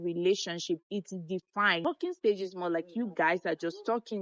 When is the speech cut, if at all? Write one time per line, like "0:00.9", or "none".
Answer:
0:01.8

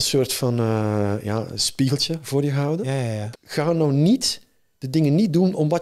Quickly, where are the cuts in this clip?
0:03.2

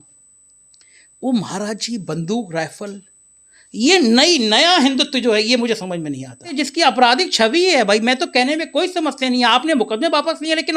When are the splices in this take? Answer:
0:06.6

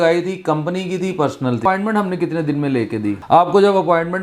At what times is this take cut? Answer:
0:01.6
0:03.2

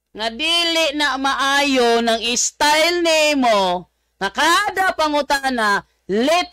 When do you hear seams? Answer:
none

